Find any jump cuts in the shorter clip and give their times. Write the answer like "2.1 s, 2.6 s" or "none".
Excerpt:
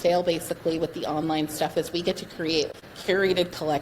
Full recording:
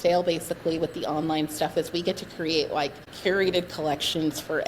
2.7 s